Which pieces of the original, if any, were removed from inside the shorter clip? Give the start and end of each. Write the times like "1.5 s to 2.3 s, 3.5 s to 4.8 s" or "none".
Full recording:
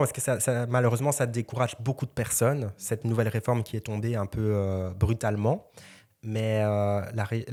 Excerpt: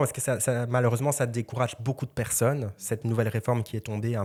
none